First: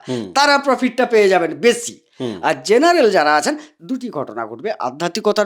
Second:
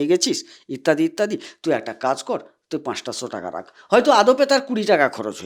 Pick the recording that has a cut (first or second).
first